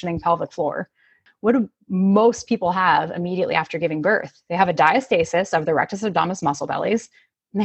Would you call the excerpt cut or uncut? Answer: cut